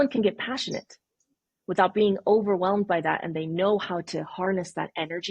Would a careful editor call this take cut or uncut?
uncut